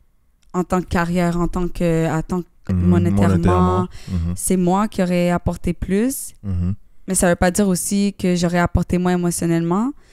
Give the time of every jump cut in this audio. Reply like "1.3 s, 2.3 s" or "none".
2.6 s, 6.9 s